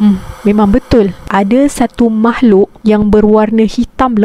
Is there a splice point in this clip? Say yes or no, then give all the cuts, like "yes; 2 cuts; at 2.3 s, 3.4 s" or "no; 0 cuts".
no; 0 cuts